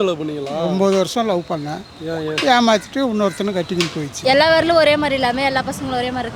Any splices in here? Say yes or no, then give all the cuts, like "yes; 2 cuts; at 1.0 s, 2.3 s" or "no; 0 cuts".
yes; 1 cut; at 4.2 s